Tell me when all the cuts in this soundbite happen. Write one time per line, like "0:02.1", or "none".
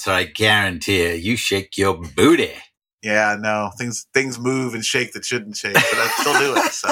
none